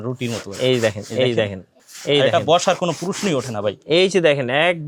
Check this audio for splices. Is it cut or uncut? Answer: uncut